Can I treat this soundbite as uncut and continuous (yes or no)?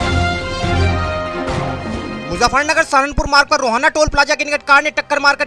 no